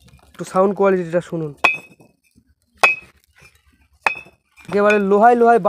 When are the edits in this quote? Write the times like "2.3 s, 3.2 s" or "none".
4.7 s